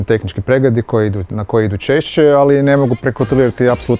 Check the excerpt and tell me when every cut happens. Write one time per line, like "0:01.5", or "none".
none